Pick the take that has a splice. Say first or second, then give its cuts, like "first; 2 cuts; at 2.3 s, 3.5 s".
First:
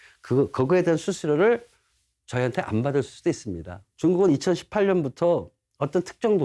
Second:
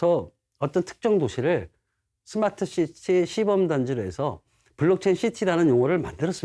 first; 1 cut; at 3.8 s